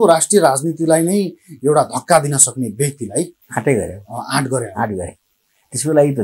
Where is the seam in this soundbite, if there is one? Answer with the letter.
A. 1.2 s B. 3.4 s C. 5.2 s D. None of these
B